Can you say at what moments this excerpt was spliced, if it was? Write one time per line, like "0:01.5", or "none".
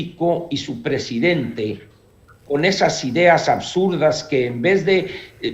none